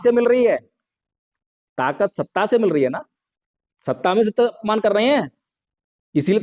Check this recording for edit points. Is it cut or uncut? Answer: cut